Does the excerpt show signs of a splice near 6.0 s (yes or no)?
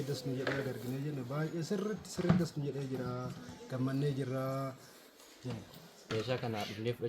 yes